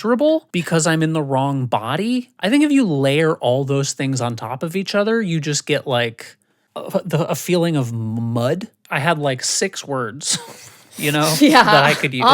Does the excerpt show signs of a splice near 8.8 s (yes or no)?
yes